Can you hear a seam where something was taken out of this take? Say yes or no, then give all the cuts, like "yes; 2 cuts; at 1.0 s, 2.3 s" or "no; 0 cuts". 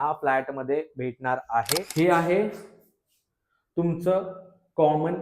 yes; 1 cut; at 1.9 s